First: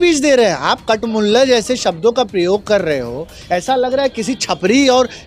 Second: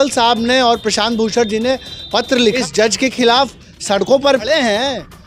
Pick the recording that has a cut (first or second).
second